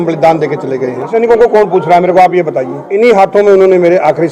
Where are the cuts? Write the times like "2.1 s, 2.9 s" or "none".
1.1 s, 2.8 s